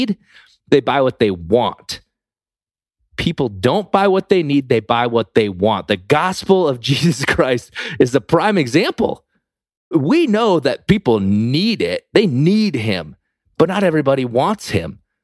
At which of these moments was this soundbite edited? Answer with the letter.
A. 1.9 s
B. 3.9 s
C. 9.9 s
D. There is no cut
C